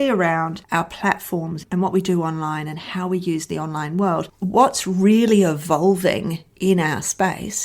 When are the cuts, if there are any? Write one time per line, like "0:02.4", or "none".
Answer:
0:01.6
0:04.3